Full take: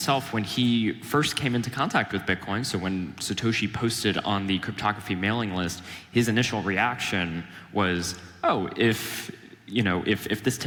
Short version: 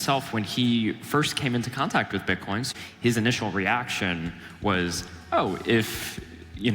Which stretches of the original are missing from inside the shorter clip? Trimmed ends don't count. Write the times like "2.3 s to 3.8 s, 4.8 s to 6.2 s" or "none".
2.7 s to 5.8 s

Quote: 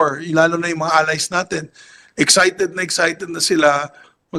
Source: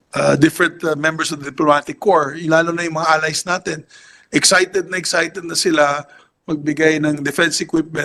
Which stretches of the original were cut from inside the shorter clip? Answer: none

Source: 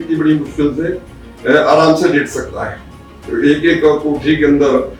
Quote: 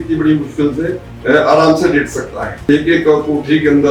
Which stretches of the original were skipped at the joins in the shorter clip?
1.1 s to 1.3 s, 2.9 s to 3.4 s

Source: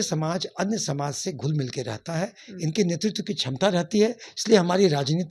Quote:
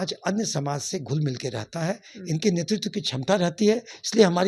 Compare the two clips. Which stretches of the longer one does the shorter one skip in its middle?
none

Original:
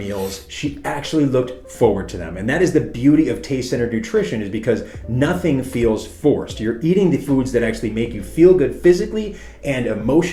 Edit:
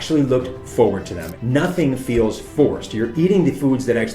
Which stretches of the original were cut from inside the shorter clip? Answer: 2.3 s to 4.9 s

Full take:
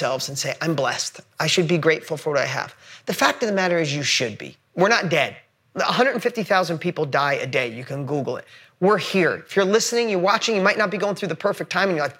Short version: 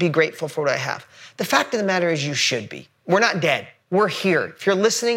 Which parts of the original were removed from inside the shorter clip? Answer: 5.4 s to 8.6 s

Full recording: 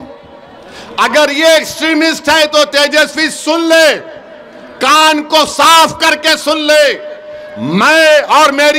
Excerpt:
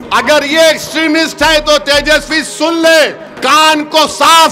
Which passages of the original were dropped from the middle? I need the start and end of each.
4.1 s to 4.6 s

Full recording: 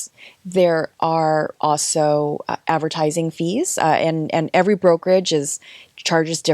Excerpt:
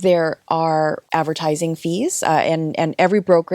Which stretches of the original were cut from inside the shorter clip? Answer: 1.5 s to 2.6 s

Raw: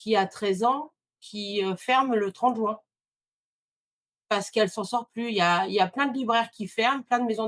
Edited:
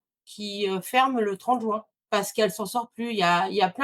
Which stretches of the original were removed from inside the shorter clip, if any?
3.2 s to 4.5 s

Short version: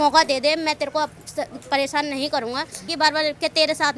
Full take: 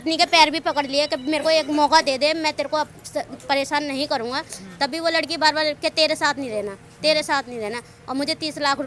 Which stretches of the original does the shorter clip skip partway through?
4.7 s to 5.3 s

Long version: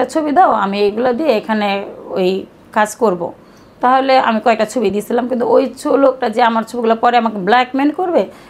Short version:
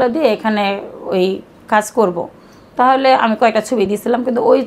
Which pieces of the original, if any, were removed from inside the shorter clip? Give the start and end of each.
none

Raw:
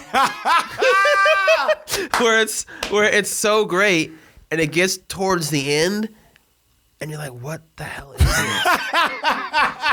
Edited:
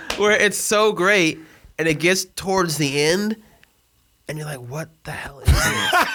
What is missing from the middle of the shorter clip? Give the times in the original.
none

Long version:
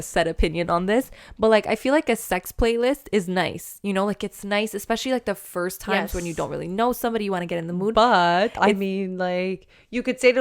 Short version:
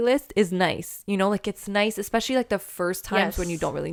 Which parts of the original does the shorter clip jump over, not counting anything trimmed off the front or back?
none

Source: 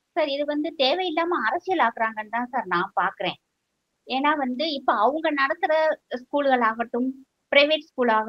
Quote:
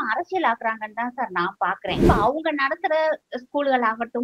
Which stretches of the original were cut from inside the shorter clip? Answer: 3.4 s to 4.8 s

